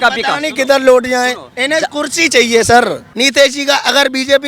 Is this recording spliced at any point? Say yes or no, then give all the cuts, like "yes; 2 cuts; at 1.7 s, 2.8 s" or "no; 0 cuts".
yes; 1 cut; at 3.1 s